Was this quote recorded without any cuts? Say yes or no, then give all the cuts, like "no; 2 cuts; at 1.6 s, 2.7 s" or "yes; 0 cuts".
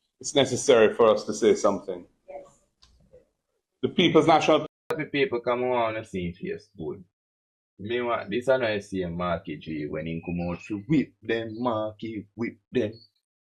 no; 1 cut; at 4.6 s